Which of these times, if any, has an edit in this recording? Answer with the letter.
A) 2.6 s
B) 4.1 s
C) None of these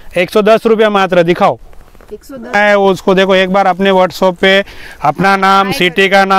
A